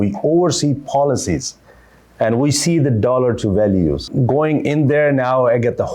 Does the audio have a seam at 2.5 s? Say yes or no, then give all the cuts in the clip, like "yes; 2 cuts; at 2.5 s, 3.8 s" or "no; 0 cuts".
no; 1 cut; at 4.1 s